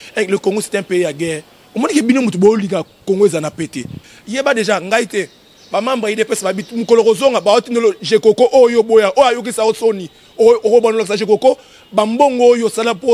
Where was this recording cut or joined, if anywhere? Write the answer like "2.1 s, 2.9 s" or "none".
4.0 s